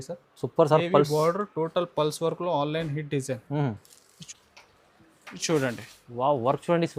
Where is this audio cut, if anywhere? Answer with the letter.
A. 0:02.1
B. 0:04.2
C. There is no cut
B